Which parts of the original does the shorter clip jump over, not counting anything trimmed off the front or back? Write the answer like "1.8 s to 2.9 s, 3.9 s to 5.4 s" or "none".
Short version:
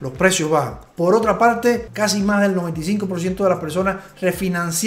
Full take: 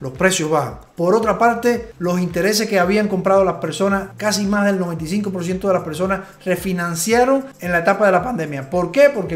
1.9 s to 4.1 s